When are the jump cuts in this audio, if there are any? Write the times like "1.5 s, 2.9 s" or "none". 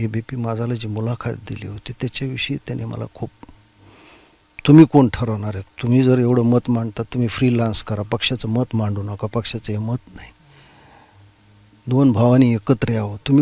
none